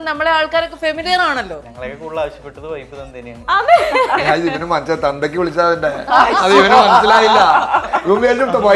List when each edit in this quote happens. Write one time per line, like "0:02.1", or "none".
0:01.7